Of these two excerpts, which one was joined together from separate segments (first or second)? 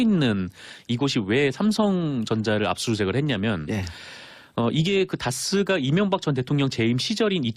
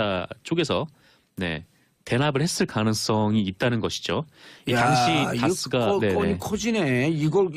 first